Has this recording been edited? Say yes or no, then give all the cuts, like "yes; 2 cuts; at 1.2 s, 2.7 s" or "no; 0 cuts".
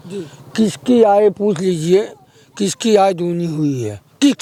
no; 0 cuts